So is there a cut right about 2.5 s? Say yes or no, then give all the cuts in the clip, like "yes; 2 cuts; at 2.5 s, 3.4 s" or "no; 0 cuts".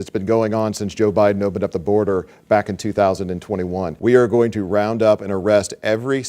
no; 1 cut; at 3.9 s